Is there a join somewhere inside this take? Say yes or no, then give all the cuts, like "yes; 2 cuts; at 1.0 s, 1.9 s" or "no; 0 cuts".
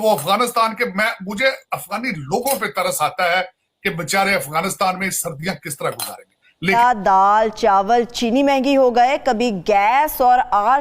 yes; 1 cut; at 6.7 s